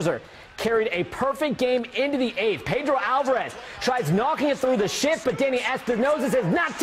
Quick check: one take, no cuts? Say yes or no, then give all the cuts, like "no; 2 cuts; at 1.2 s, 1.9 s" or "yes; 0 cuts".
yes; 0 cuts